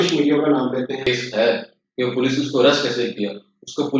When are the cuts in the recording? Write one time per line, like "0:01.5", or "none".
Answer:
0:01.1